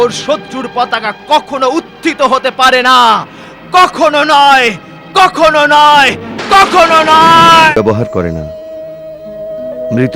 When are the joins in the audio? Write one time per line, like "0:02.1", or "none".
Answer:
0:07.7

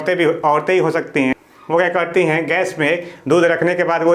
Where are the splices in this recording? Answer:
0:01.5

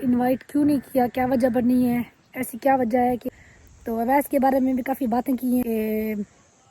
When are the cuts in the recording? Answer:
0:03.3
0:05.6

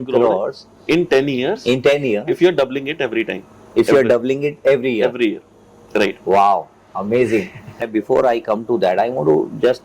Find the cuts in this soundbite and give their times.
0:07.8

